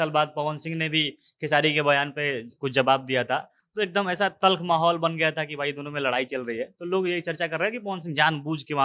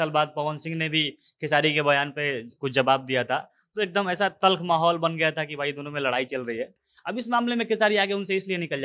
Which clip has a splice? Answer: second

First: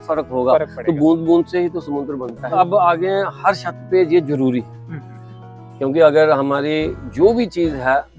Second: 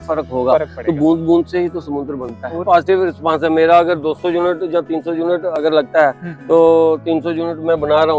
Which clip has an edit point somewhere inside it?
second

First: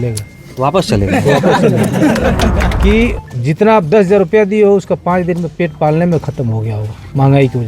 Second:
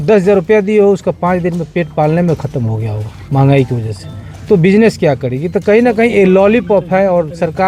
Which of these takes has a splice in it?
first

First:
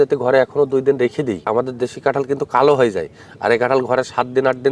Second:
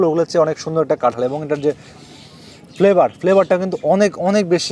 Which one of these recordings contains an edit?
first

